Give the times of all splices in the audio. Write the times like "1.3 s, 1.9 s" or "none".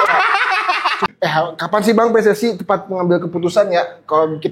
1.1 s